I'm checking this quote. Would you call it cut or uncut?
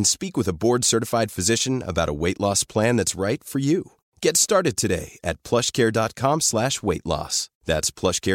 uncut